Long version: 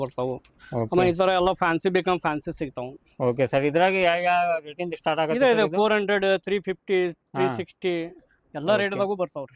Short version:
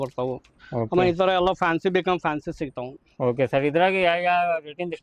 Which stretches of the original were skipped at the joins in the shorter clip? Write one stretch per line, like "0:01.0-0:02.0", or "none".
none